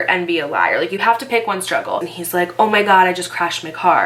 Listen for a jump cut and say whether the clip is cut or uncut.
cut